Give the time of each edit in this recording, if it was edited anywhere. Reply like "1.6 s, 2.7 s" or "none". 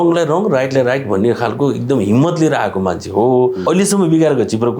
3.6 s